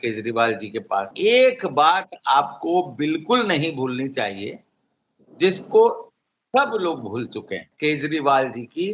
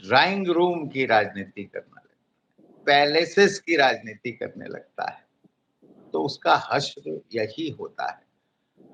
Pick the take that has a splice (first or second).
first